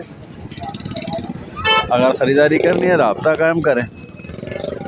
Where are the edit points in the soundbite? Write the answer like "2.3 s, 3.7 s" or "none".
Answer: none

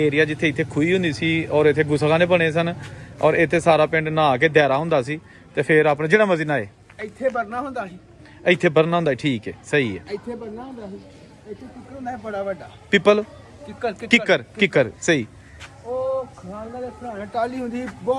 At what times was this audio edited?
none

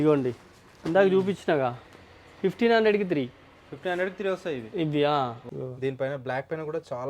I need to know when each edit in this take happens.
5.4 s

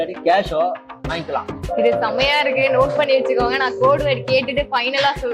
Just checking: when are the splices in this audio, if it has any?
1.6 s

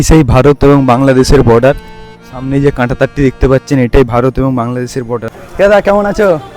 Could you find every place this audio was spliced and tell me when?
5.3 s

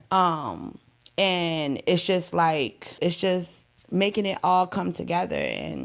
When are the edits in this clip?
2.9 s

